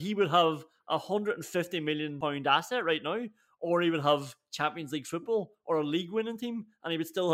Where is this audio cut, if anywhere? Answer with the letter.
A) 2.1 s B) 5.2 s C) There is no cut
A